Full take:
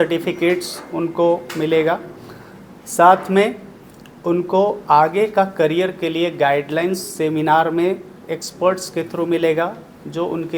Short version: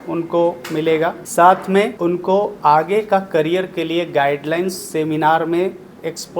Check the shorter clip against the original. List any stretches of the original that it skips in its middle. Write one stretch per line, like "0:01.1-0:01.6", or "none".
0:02.1-0:02.8
0:03.5-0:04.2